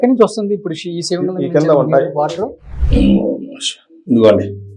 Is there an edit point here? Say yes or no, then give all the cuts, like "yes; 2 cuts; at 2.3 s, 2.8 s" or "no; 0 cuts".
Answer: no; 0 cuts